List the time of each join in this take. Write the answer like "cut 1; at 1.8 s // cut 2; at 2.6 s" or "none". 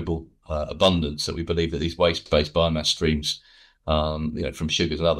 cut 1; at 2.2 s